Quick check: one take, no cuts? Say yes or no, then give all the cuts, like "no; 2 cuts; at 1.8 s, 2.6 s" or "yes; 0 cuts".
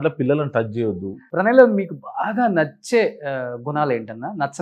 no; 1 cut; at 1.1 s